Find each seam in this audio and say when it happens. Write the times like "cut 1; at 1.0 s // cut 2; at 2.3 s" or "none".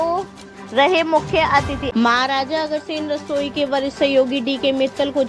cut 1; at 1.9 s